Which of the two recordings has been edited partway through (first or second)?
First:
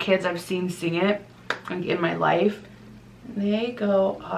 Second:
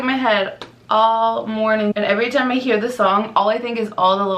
second